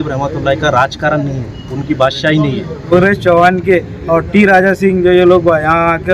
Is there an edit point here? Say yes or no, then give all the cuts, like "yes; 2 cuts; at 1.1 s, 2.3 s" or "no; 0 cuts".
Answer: yes; 1 cut; at 2.8 s